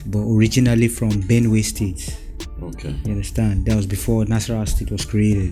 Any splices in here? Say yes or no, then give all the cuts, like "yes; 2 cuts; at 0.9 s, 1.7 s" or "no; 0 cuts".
no; 0 cuts